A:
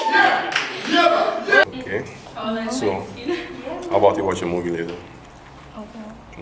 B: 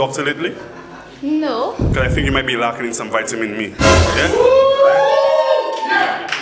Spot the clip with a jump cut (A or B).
A